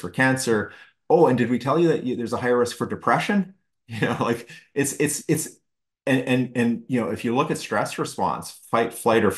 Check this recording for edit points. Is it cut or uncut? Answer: uncut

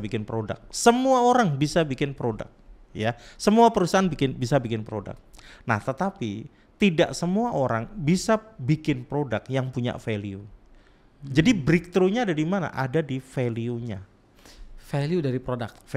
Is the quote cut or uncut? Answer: uncut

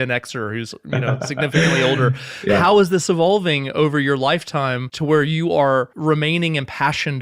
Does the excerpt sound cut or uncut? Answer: cut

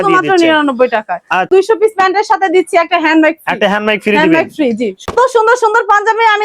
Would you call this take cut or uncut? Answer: cut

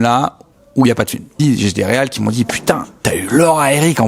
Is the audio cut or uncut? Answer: cut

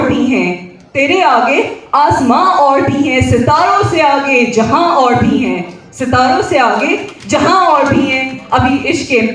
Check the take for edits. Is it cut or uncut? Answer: uncut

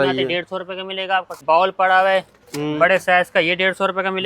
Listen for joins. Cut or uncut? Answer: cut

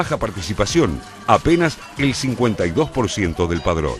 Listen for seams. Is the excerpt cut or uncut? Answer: uncut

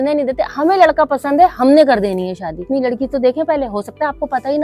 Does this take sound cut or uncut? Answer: cut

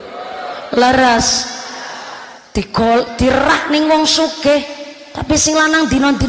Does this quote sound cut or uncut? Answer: uncut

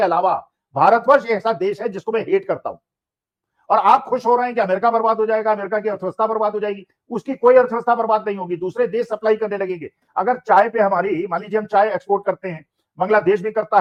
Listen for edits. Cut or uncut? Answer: uncut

